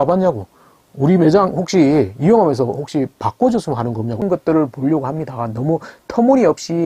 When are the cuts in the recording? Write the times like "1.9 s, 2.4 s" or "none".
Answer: 4.2 s